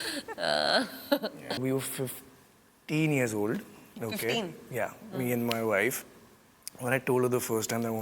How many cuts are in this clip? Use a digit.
1